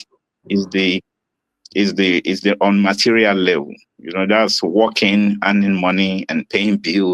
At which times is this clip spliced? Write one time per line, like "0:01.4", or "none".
none